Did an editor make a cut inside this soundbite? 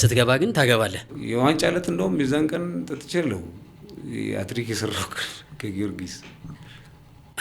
yes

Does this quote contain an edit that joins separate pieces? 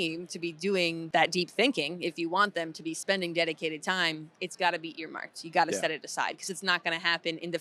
yes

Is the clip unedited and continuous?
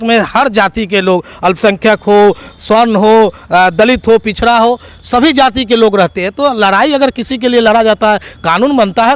yes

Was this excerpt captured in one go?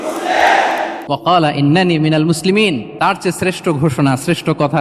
no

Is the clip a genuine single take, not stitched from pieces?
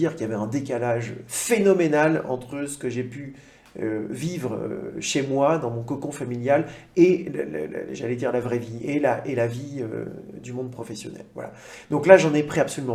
yes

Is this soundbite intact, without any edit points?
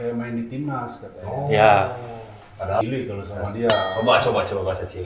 no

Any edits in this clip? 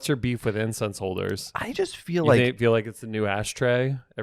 no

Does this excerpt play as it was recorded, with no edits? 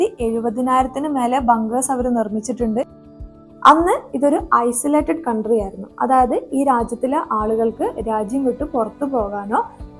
no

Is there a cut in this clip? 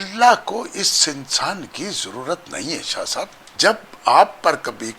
yes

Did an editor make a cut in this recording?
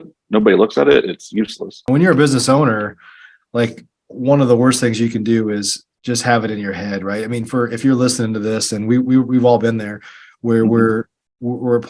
yes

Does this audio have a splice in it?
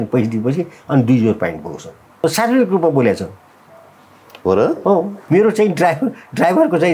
yes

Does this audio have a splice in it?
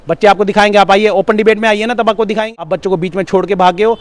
yes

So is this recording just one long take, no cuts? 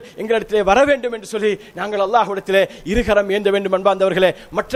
yes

